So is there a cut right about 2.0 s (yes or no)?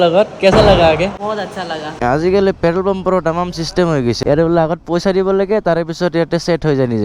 yes